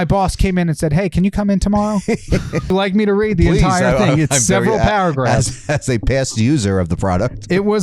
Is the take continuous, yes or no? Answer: no